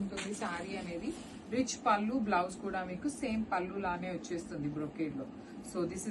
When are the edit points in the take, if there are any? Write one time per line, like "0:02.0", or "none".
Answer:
none